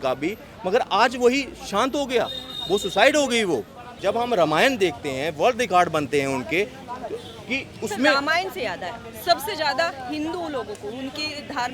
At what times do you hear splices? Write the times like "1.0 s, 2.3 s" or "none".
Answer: 3.9 s